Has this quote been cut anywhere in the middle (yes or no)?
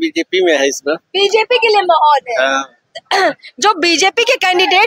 no